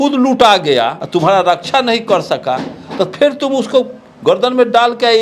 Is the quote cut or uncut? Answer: cut